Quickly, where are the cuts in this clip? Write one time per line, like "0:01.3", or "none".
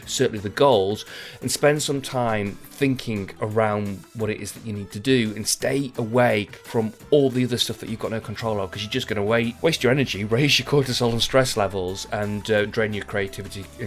0:06.6